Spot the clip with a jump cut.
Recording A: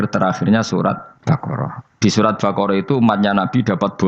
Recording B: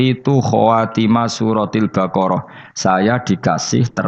A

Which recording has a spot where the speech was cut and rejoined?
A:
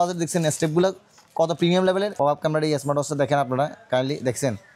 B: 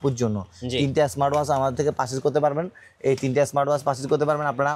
A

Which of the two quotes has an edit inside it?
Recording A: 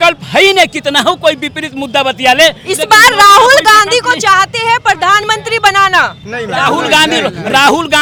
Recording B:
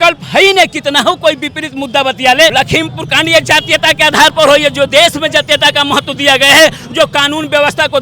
B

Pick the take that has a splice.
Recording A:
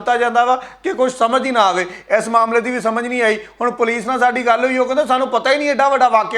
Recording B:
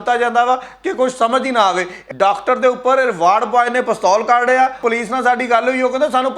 B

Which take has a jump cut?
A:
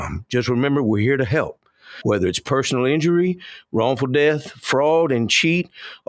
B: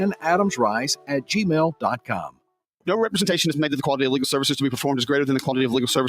B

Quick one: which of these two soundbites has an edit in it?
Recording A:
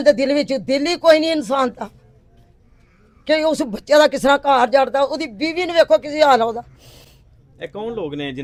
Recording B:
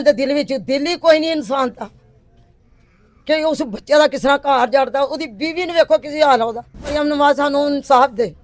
B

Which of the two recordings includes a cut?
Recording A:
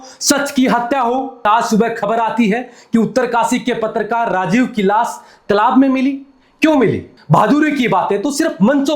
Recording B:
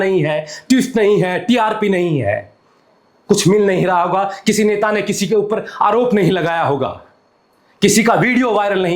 A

